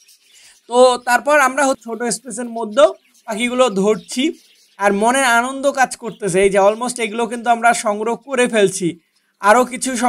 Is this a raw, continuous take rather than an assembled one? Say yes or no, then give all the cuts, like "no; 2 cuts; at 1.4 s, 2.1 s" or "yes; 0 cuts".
no; 1 cut; at 1.8 s